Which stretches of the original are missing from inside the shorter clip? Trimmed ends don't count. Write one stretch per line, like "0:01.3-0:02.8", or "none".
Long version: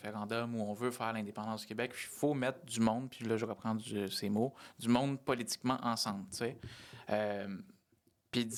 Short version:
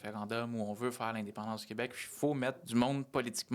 0:02.6-0:04.7